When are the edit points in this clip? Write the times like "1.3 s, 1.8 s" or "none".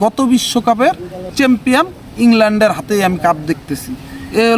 1.2 s

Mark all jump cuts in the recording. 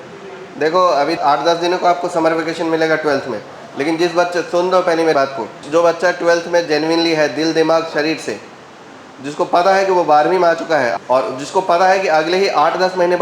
1.2 s, 5.2 s, 10.9 s

